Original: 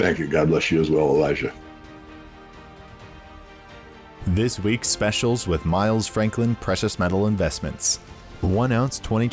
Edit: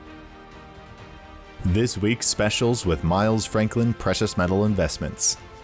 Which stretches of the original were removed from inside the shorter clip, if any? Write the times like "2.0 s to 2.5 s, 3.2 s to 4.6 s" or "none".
3.6 s to 4.2 s